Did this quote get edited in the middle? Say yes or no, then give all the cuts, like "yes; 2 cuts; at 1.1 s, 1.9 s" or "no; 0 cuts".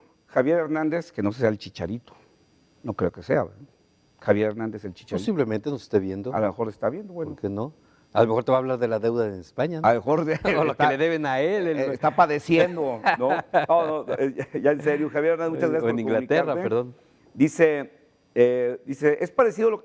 yes; 1 cut; at 11.8 s